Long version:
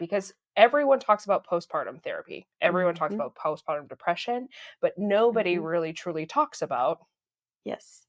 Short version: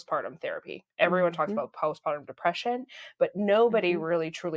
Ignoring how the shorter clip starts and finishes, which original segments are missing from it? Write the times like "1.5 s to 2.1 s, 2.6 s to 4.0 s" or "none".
none